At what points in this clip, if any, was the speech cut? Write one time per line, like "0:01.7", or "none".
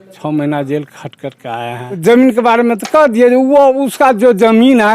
0:02.0

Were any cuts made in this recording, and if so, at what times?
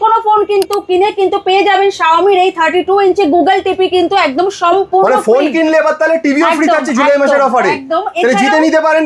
none

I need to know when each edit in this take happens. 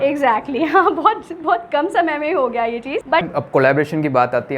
0:03.2

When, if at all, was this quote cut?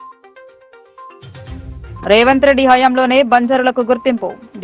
0:01.4

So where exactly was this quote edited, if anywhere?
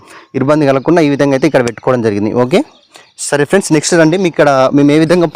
none

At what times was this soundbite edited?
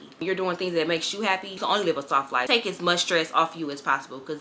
0:01.5
0:02.4

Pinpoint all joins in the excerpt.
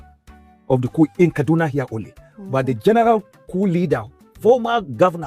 0:04.3

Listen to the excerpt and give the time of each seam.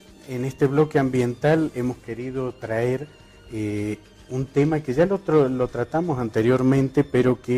0:02.7

